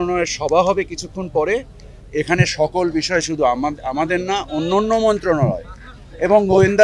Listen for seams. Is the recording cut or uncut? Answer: uncut